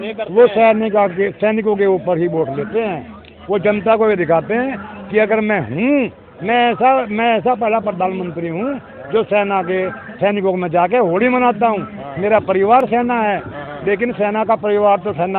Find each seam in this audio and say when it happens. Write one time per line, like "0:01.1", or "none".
none